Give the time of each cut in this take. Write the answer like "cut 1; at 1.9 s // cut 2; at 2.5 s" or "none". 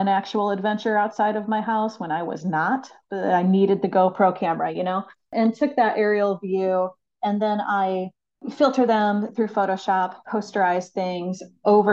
none

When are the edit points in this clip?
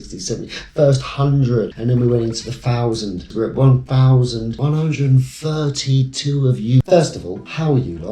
cut 1; at 3.3 s // cut 2; at 4.6 s // cut 3; at 6.8 s

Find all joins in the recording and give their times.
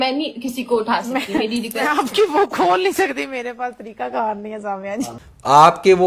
none

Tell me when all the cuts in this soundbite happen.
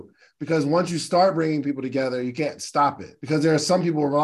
cut 1; at 3.1 s

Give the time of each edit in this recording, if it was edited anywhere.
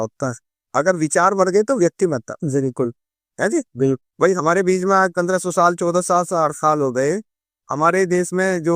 none

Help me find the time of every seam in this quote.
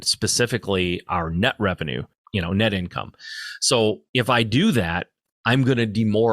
cut 1; at 2.1 s // cut 2; at 4.0 s

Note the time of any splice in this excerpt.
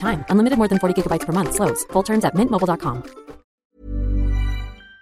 cut 1; at 3.6 s

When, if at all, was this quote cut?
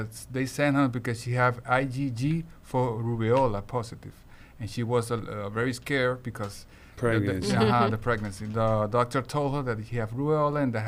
none

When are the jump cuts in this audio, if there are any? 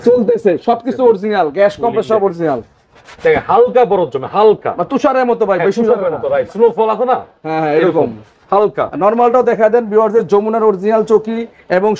none

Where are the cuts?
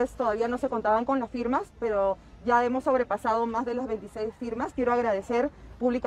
none

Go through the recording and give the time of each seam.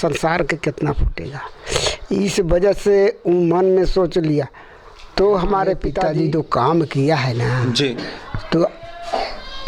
cut 1; at 6.0 s

